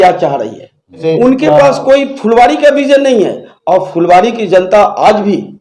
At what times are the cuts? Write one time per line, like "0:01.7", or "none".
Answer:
0:01.0